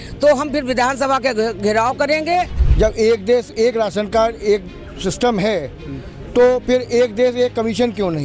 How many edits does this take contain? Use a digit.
1